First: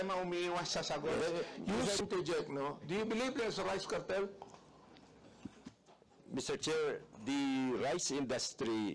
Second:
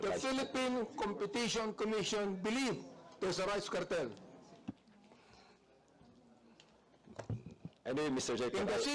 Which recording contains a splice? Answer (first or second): first